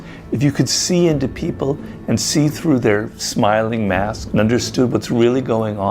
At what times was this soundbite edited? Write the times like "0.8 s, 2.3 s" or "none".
4.2 s